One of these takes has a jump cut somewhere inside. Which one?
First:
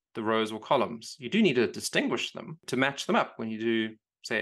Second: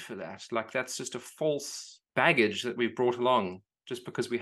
first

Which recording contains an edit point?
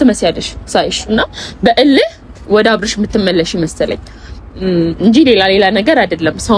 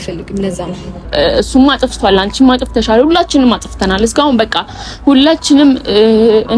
second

